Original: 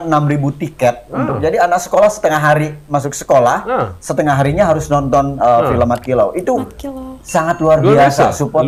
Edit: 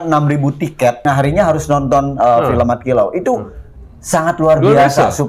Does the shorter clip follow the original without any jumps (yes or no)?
no